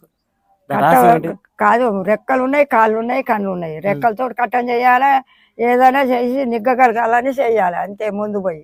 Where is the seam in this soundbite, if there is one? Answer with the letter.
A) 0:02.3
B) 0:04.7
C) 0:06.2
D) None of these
D